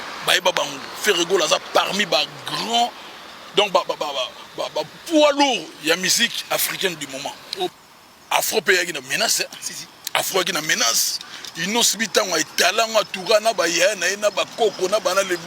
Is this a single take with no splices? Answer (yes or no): no